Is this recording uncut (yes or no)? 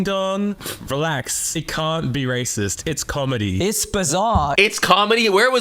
yes